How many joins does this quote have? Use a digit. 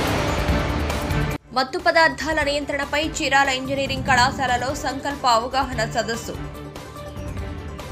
1